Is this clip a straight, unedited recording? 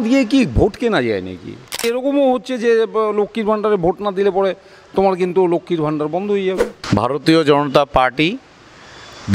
no; 2 cuts; at 1.9 s, 6.8 s

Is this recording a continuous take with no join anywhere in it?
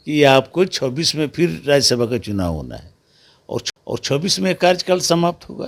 yes; 0 cuts

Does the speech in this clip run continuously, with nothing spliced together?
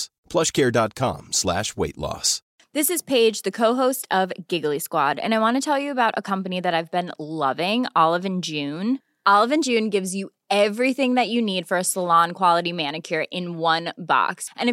no; 1 cut; at 2.4 s

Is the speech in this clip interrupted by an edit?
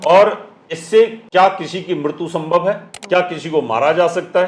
yes; 2 cuts; at 1.2 s, 2.9 s

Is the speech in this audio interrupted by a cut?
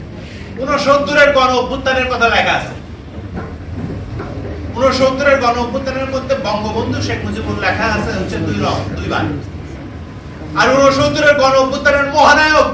no; 0 cuts

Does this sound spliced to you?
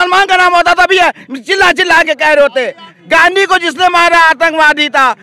yes; 1 cut; at 2.9 s

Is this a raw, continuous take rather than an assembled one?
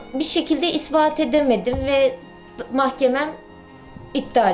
yes; 0 cuts

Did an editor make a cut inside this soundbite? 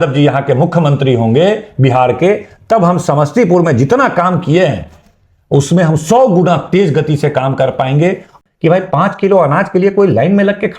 yes; 1 cut; at 8.4 s

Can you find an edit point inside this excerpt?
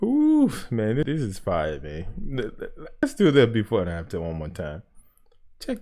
yes; 2 cuts; at 1.0 s, 3.0 s

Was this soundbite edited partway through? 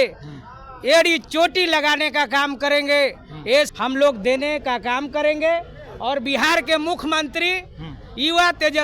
yes; 1 cut; at 3.7 s

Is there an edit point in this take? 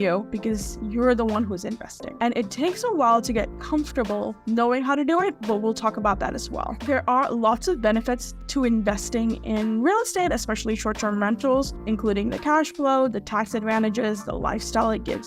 no; 0 cuts

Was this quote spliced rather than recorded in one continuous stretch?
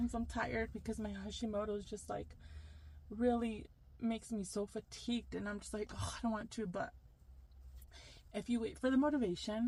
no; 0 cuts

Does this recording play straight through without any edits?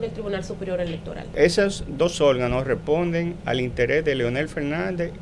no; 1 cut; at 1.3 s

